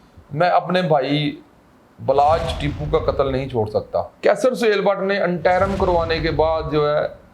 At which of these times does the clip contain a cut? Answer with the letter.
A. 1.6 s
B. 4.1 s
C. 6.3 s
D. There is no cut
B